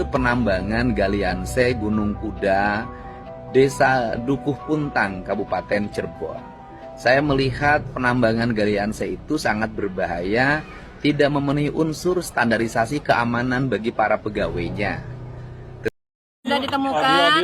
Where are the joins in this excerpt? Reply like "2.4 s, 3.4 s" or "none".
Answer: 15.9 s